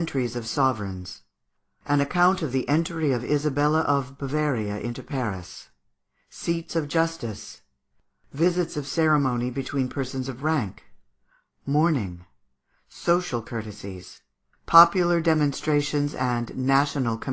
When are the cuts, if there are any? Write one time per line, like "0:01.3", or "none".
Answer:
0:07.1